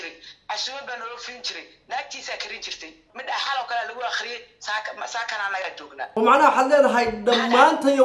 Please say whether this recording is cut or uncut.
cut